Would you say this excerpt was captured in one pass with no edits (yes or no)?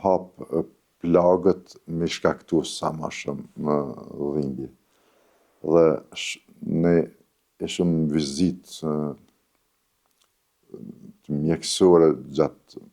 yes